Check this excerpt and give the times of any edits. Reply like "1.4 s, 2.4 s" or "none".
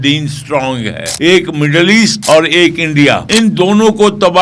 1.0 s, 2.2 s, 3.2 s

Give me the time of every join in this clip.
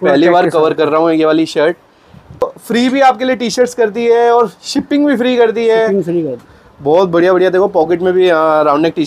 2.4 s, 6.4 s

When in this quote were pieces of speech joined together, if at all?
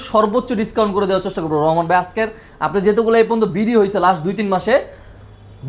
none

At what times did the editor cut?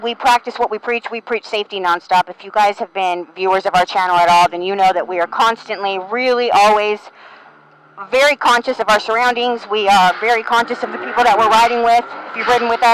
none

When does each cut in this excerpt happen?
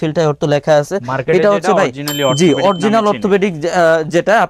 none

